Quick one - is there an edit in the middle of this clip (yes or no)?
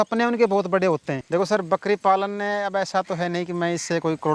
yes